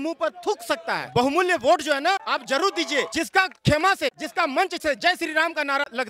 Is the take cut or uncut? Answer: cut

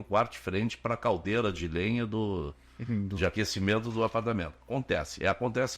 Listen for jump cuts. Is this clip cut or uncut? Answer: uncut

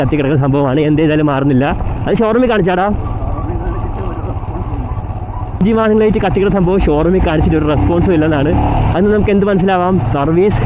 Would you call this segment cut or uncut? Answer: uncut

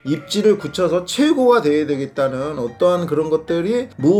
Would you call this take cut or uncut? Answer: uncut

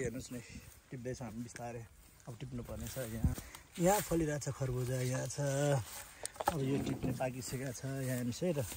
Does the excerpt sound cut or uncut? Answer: cut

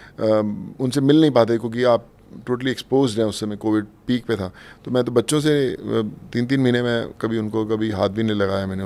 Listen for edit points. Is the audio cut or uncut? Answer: uncut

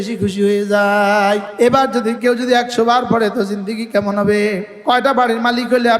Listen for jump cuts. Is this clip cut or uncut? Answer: cut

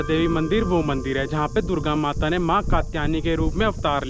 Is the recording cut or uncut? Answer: uncut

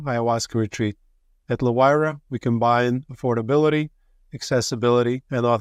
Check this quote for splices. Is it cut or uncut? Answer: uncut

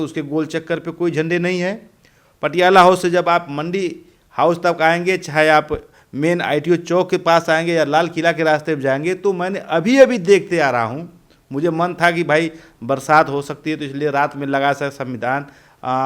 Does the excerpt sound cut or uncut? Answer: uncut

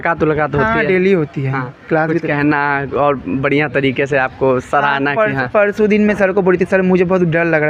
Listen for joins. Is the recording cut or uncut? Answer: uncut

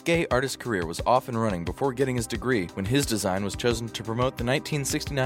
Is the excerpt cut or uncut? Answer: cut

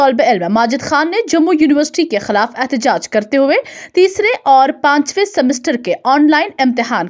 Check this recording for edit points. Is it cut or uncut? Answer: uncut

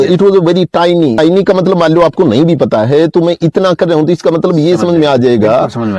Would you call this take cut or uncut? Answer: cut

